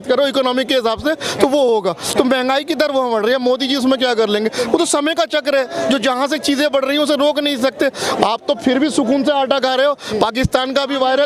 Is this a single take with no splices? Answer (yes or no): yes